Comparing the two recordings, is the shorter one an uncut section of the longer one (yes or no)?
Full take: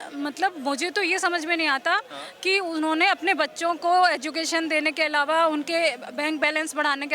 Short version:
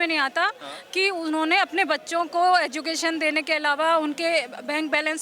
yes